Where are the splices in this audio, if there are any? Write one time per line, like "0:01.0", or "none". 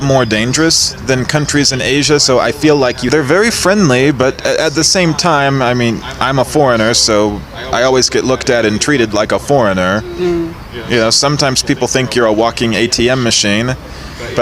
0:03.0